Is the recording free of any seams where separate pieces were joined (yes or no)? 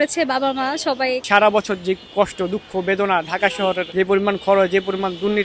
no